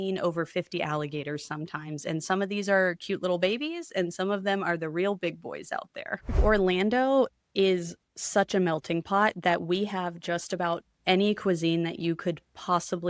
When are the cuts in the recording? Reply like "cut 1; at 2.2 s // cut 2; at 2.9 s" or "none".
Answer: cut 1; at 6.4 s